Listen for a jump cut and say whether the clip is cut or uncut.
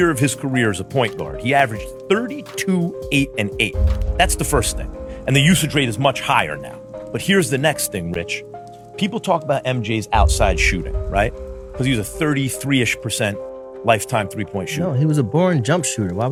uncut